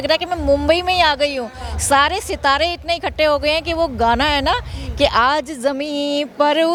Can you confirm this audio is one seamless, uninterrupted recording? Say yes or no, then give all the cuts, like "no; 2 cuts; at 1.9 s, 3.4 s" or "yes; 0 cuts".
yes; 0 cuts